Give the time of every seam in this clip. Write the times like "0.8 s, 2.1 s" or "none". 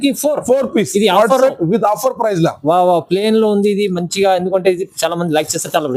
none